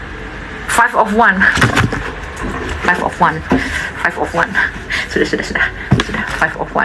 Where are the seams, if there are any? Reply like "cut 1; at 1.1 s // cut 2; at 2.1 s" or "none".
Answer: none

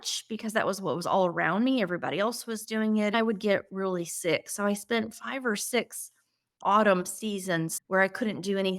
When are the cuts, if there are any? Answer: cut 1; at 3.1 s // cut 2; at 7.8 s

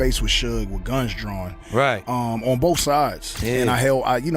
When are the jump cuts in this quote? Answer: cut 1; at 3.3 s

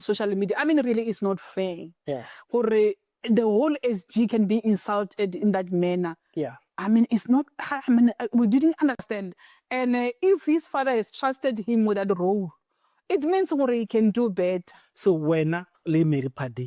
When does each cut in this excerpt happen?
cut 1; at 9.0 s

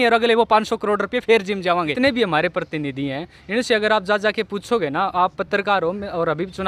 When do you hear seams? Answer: cut 1; at 1.9 s

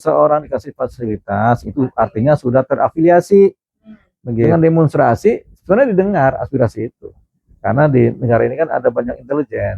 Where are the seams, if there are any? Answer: cut 1; at 4.5 s

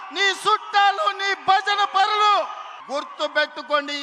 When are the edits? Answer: cut 1; at 2.7 s

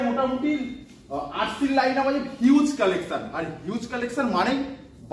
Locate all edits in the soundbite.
none

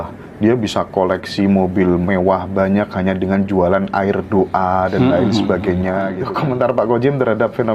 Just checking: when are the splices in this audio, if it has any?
cut 1; at 6.2 s

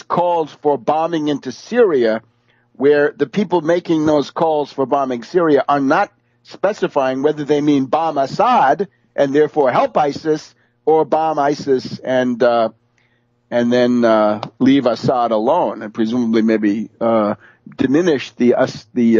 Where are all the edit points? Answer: cut 1; at 8.5 s

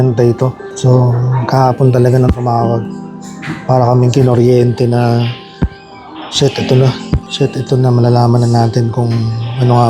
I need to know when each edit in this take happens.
none

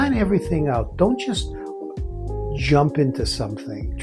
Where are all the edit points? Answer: none

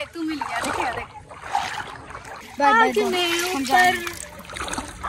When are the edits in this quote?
cut 1; at 2.5 s

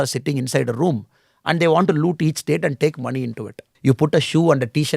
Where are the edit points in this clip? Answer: cut 1; at 3.6 s

